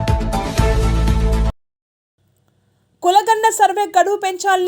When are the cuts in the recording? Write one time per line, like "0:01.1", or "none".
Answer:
0:01.3